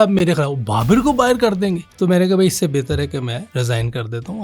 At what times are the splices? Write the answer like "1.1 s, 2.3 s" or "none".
1.9 s, 3.5 s